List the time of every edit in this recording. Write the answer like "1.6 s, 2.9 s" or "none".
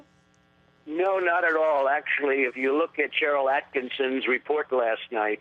1.8 s